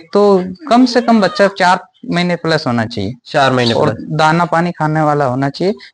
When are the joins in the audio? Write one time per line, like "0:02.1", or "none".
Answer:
none